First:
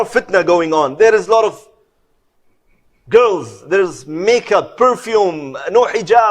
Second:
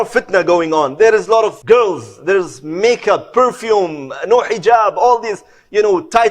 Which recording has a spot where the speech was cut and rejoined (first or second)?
second